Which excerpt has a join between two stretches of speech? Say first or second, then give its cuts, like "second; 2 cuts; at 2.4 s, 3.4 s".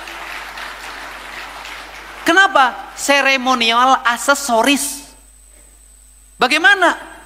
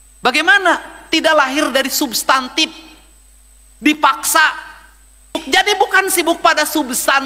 second; 1 cut; at 5.4 s